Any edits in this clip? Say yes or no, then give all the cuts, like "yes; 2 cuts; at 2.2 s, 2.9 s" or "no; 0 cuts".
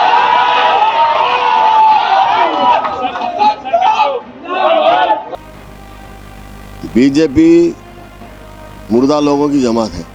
yes; 1 cut; at 5.3 s